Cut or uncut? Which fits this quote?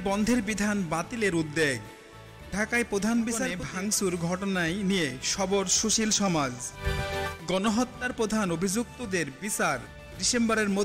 cut